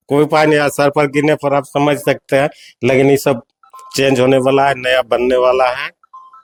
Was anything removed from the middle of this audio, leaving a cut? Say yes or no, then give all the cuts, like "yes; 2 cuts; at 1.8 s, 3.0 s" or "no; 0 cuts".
no; 0 cuts